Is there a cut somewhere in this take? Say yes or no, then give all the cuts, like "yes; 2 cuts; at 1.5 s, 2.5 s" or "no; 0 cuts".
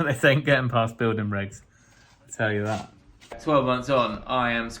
yes; 1 cut; at 3.4 s